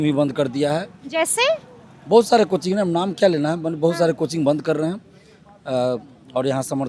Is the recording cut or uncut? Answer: uncut